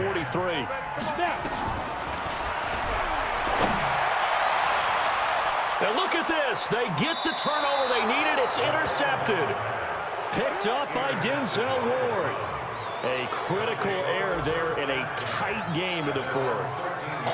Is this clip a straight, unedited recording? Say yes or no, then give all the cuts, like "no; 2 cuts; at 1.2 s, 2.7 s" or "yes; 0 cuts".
yes; 0 cuts